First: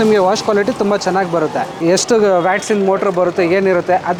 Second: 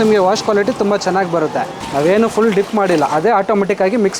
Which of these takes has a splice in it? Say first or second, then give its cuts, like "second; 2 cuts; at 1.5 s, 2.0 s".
second; 1 cut; at 1.8 s